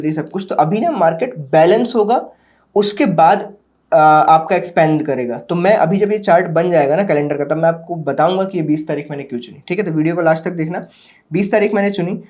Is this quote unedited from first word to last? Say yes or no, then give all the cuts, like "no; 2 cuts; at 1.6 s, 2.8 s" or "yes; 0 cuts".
yes; 0 cuts